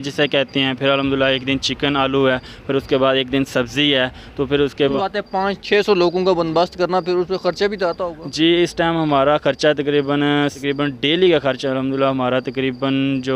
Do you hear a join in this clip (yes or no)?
yes